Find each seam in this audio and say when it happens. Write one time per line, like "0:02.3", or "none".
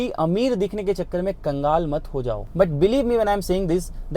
0:02.5